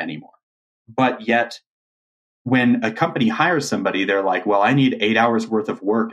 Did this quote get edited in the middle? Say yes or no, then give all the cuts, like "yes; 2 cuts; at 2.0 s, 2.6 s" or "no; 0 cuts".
no; 0 cuts